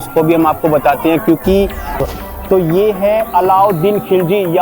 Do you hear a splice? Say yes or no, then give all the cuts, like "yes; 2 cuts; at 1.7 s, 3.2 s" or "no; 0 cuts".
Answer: yes; 1 cut; at 1.8 s